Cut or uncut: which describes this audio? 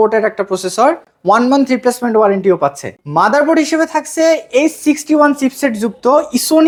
uncut